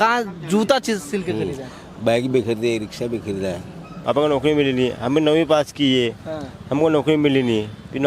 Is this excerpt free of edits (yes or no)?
no